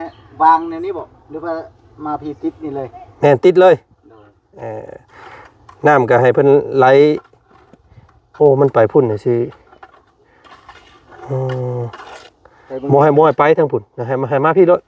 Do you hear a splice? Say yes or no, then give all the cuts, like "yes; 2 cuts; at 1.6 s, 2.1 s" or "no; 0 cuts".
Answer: no; 0 cuts